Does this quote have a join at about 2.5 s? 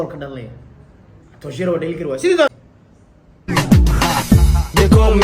yes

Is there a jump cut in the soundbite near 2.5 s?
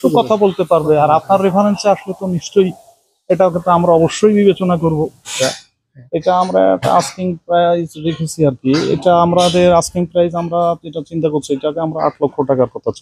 no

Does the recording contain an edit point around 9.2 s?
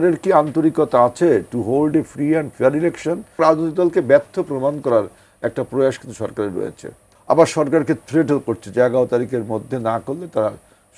no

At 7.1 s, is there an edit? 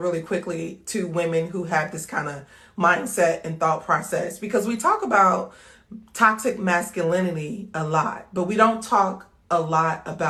no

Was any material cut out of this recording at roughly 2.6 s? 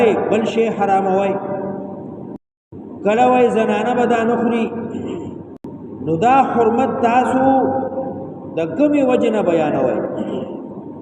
yes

